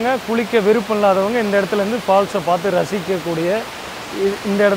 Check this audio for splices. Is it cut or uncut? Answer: uncut